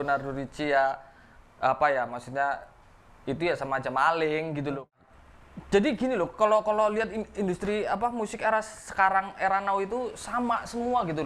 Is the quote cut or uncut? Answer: cut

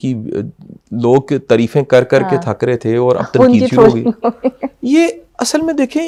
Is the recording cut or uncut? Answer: uncut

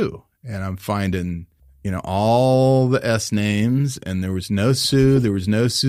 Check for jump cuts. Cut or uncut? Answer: uncut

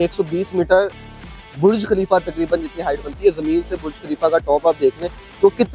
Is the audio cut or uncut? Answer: uncut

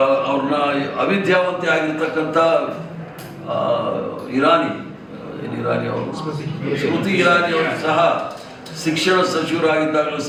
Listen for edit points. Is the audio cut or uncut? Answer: uncut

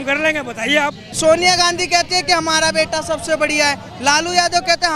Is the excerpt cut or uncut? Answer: cut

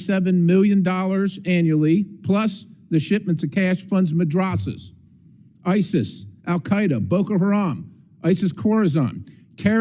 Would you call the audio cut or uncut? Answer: uncut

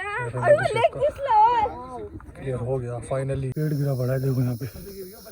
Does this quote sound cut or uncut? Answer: cut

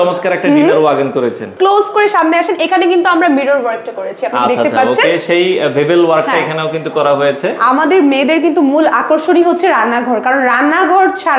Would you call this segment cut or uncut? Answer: cut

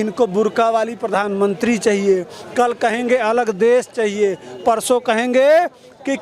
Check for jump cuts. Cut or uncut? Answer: uncut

